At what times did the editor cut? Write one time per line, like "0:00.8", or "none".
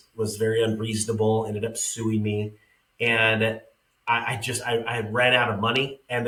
none